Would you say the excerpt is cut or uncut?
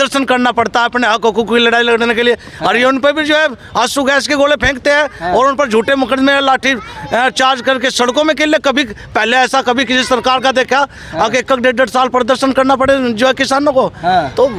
uncut